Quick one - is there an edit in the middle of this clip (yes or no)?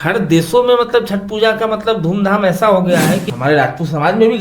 yes